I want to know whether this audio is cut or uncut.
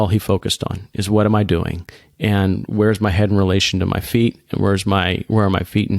uncut